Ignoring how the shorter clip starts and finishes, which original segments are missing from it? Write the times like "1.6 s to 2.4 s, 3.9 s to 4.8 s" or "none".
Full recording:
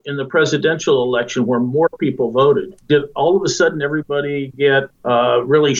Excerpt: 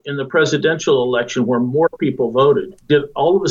none